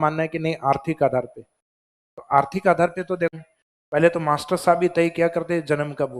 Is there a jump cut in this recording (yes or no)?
yes